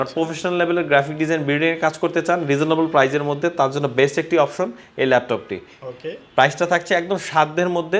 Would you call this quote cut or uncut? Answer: uncut